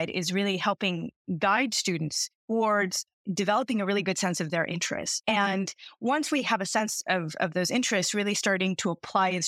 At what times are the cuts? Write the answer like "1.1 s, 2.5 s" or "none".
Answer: none

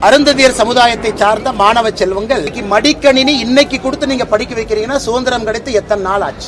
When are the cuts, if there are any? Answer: 2.6 s

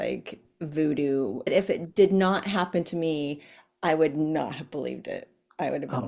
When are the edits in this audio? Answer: 1.5 s

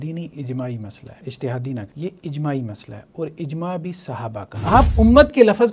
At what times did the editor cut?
1.1 s, 1.9 s, 4.5 s

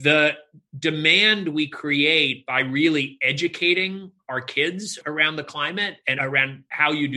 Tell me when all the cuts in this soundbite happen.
5.0 s, 6.2 s

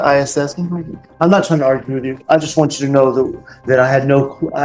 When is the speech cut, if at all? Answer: none

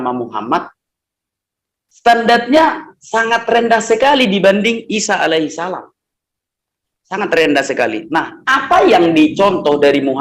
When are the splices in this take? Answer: none

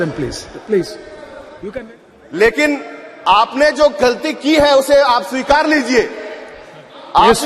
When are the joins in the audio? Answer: 1.6 s

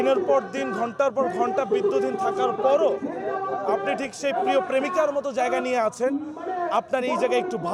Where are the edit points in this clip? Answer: none

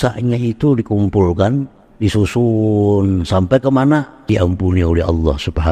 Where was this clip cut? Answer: 4.2 s

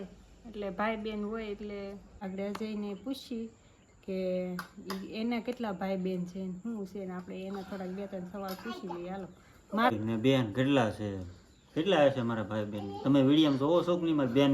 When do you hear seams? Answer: 2.1 s, 9.9 s

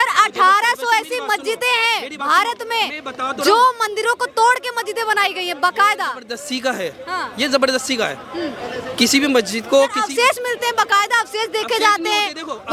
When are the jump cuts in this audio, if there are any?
none

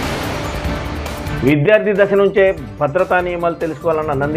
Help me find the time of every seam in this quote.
1.4 s

